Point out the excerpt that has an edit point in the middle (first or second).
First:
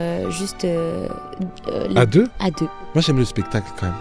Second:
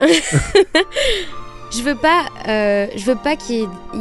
first